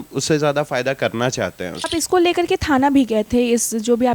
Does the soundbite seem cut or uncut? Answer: cut